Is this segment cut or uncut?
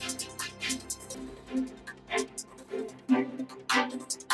uncut